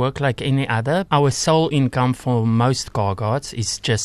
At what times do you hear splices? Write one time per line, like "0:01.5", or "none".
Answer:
0:01.1